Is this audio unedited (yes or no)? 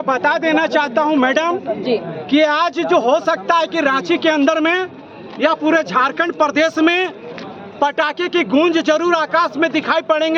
yes